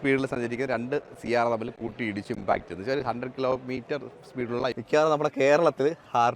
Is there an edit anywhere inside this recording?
yes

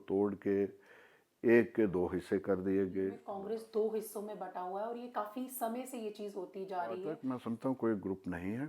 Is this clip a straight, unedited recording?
no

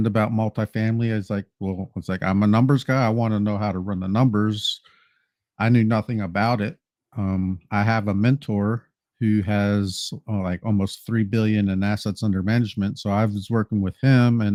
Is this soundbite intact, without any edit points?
yes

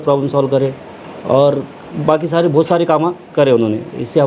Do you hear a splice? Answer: no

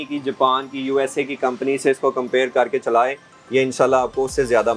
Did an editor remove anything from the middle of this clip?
no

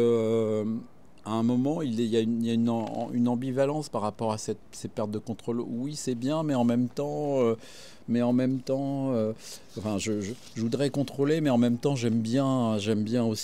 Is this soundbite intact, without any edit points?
yes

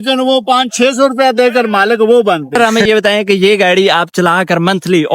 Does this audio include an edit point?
yes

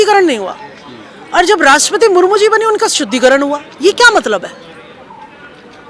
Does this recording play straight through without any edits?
yes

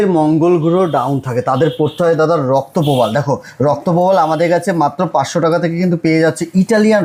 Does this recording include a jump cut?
no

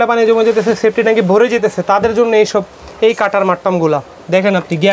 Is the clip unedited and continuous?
yes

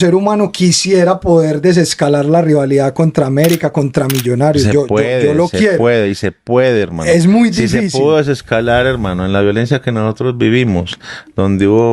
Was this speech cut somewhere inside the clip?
no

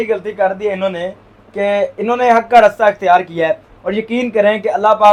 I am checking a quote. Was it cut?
no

